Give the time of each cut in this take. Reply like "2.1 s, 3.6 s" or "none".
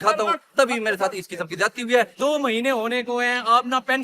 2.2 s

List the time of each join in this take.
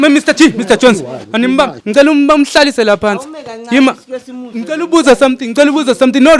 1.8 s

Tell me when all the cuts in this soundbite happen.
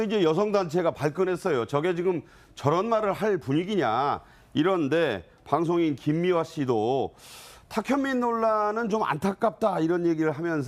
3.1 s

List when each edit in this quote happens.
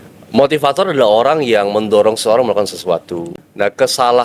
3.3 s

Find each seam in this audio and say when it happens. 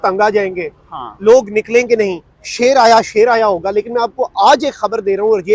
none

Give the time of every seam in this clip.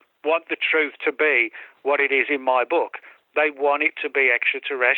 none

